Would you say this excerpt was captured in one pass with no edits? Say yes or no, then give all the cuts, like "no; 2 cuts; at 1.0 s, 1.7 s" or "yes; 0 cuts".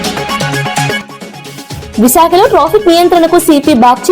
no; 1 cut; at 1.0 s